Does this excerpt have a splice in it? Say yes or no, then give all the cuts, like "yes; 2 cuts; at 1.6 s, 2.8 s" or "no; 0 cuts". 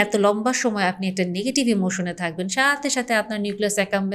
no; 0 cuts